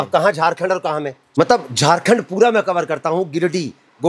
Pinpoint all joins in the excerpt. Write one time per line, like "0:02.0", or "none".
0:01.2